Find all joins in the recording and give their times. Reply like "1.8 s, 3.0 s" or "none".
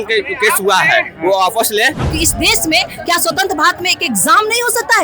2.0 s